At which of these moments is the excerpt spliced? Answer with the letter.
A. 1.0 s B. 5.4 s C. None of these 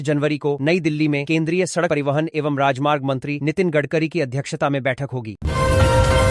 B